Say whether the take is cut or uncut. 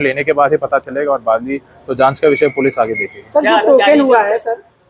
uncut